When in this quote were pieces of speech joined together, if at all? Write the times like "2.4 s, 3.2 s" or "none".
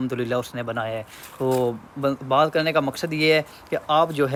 none